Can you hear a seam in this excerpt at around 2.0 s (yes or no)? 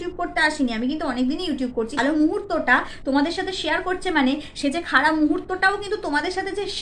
yes